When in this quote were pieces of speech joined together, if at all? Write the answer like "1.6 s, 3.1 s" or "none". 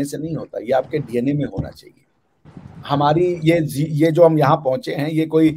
none